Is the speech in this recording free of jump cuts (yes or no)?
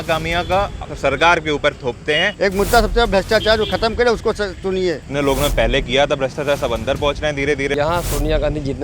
no